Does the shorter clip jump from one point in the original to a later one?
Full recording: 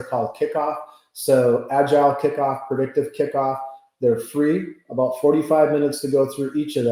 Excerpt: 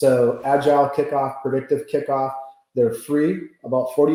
no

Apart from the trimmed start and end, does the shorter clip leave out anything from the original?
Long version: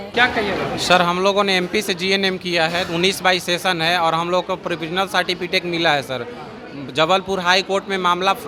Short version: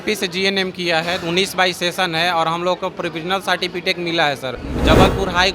yes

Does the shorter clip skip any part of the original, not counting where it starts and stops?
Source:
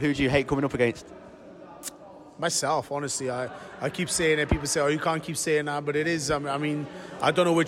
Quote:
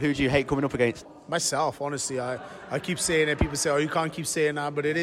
yes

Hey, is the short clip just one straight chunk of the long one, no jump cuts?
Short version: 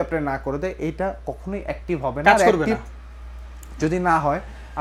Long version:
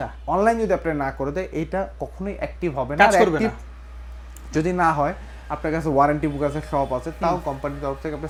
yes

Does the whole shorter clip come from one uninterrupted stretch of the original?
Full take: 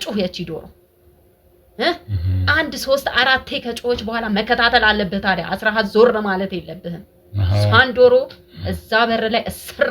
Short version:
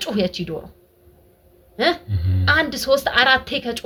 yes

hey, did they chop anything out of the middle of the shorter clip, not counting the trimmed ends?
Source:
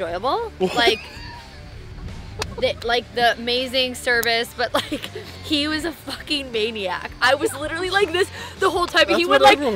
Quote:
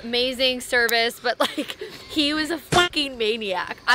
no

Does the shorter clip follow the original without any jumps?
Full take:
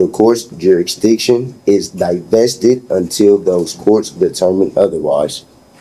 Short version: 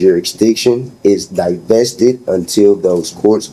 yes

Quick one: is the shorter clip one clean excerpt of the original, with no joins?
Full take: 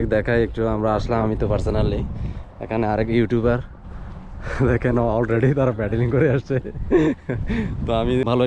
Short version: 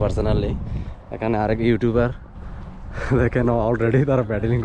yes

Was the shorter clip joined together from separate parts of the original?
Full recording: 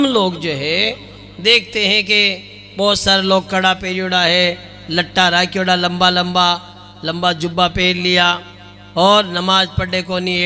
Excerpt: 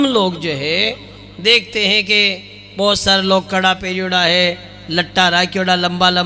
no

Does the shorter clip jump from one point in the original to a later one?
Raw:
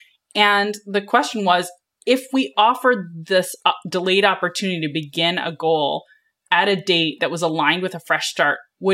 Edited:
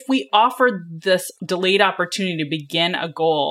yes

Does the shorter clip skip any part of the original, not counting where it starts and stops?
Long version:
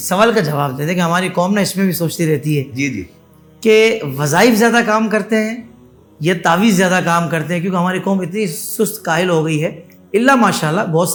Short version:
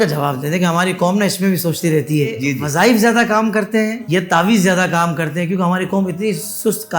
yes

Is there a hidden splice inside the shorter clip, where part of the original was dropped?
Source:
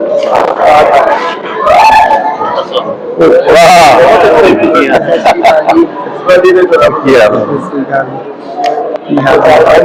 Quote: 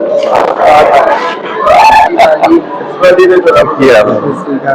yes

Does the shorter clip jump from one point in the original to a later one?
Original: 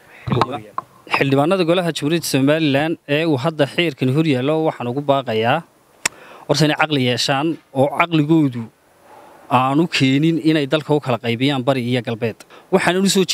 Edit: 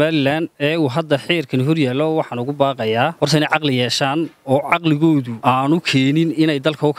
yes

